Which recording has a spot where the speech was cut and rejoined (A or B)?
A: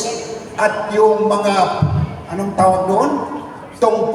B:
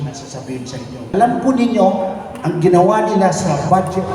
B